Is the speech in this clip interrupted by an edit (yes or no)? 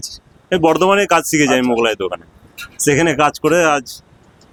no